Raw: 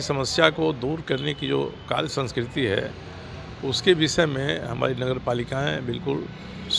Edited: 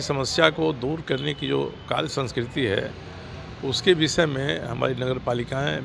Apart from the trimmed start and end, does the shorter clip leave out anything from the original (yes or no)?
no